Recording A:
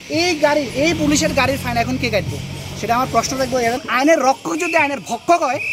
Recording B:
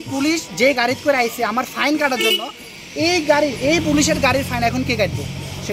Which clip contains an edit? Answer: A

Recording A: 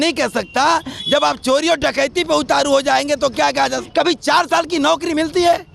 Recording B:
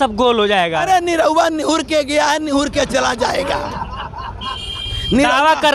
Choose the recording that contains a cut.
A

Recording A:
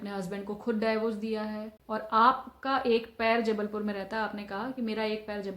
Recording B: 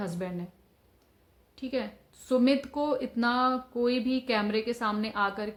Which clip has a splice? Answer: A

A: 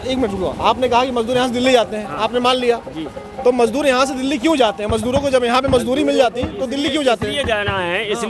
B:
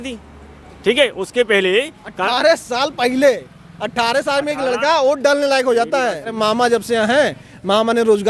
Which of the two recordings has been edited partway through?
B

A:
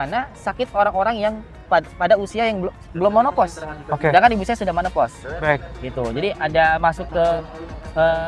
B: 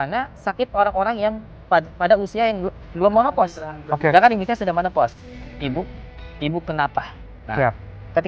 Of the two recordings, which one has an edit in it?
B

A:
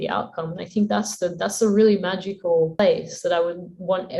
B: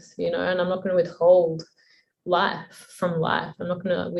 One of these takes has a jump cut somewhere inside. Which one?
A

